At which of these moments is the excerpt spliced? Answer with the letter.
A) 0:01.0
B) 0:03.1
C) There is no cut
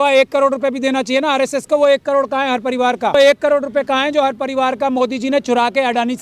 B